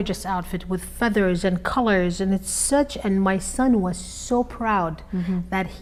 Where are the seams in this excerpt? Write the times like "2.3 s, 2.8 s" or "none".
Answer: none